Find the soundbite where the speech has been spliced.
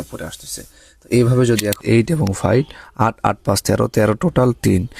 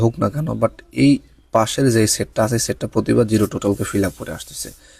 first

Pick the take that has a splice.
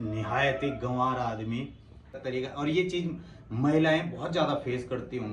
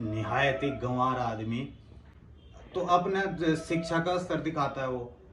first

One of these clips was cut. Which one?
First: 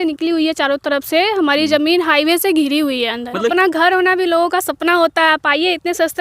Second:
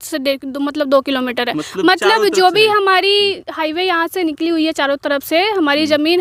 first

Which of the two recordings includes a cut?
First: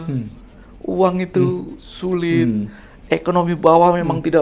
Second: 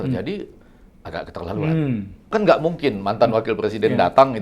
second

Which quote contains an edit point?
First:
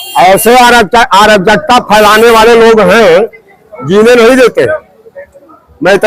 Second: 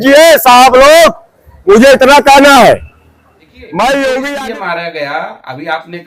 second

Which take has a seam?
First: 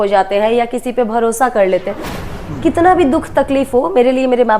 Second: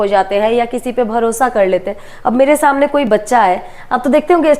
first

